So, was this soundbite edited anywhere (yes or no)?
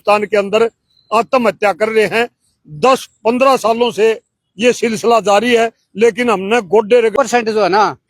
yes